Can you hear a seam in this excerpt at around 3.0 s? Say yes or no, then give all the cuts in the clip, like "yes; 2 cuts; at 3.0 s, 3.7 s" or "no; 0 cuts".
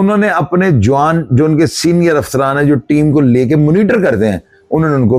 no; 0 cuts